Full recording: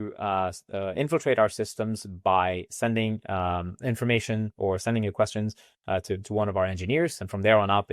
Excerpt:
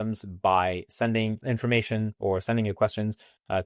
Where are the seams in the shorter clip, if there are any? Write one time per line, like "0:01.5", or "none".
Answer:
0:01.4